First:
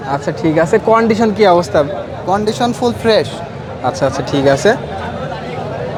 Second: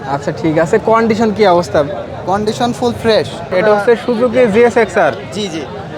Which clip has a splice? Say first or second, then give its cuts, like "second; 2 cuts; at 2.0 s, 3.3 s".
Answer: second; 1 cut; at 3.4 s